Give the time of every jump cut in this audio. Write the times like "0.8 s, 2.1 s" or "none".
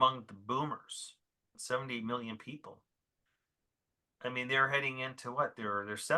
1.5 s

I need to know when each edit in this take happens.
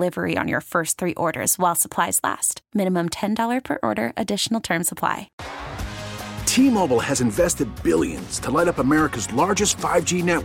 5.4 s

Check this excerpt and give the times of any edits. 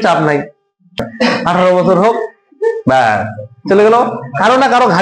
1.1 s

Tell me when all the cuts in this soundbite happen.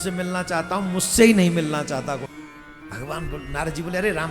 2.2 s

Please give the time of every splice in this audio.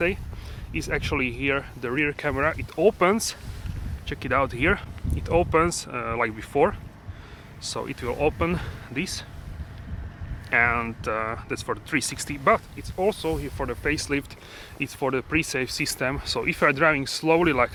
none

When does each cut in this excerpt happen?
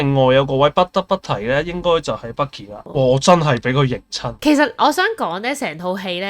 2.8 s, 4.3 s

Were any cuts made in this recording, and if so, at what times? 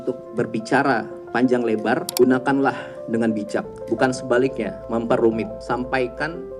2.1 s, 3.7 s, 4.7 s, 5.6 s

